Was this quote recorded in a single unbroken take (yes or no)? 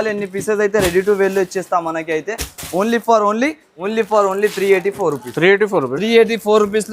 no